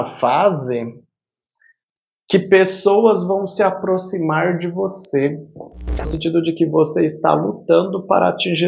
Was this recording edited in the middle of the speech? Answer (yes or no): yes